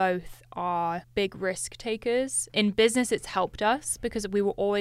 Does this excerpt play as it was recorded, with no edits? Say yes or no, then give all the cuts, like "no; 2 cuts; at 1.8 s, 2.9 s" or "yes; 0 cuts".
no; 2 cuts; at 1.0 s, 2.5 s